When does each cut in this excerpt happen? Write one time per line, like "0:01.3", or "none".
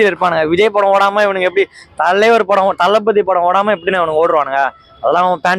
none